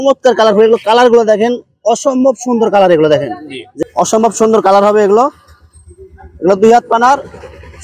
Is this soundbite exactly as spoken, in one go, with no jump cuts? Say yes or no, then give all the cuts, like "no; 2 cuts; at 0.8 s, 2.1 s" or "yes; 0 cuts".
no; 1 cut; at 3.8 s